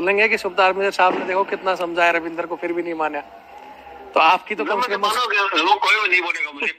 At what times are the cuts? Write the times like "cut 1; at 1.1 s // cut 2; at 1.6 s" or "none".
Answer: none